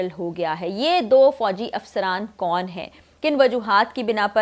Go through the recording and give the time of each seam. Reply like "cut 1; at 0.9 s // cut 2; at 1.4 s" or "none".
none